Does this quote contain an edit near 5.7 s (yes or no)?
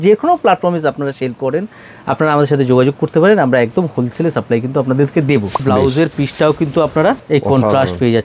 yes